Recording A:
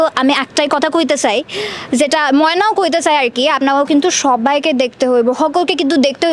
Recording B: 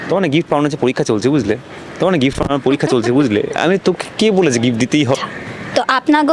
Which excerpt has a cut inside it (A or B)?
B